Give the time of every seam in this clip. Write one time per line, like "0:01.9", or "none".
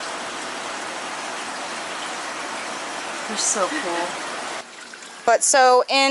0:04.6